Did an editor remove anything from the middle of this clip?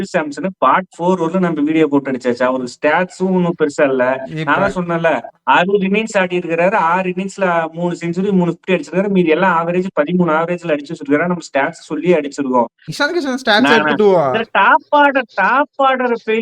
yes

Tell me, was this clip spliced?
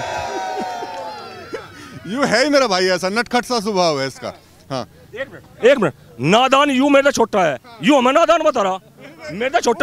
no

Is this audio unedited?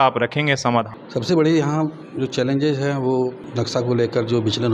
no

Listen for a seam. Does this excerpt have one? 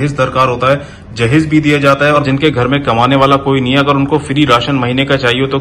yes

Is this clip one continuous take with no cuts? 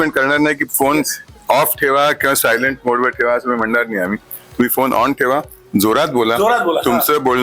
yes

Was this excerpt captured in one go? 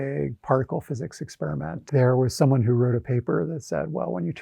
no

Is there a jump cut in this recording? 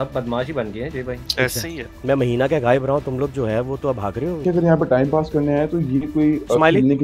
no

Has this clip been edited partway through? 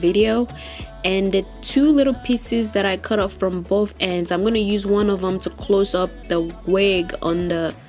no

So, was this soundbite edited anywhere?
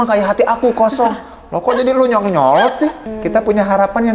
yes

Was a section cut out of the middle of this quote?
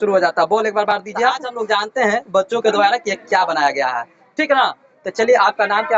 yes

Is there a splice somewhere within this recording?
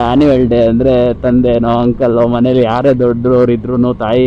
no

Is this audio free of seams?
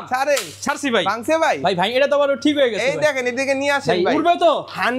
yes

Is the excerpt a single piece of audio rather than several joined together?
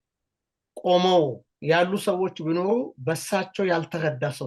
yes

